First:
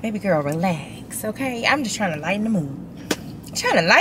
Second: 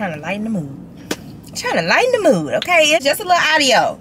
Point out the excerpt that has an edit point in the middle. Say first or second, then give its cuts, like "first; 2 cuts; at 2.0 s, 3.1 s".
second; 1 cut; at 3.0 s